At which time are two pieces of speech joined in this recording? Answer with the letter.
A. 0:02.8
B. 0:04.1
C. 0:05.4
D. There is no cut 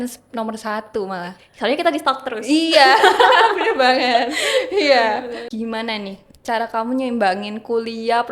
C